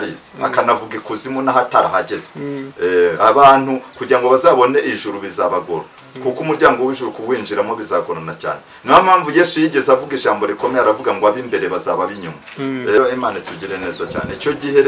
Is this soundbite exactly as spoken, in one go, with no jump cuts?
no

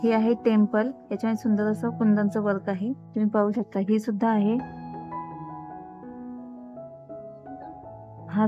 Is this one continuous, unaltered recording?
yes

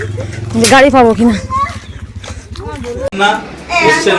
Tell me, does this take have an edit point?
yes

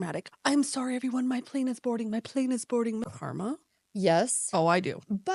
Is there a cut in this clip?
yes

